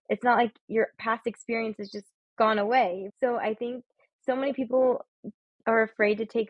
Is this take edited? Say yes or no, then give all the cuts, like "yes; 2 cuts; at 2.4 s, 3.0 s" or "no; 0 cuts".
yes; 1 cut; at 3.1 s